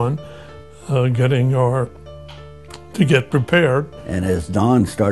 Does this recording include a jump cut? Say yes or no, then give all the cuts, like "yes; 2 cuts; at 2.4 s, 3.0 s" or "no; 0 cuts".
yes; 1 cut; at 4.0 s